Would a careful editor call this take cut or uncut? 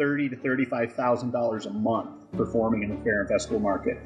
uncut